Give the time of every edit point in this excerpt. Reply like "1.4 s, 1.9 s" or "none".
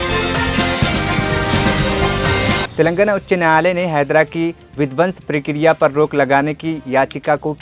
2.7 s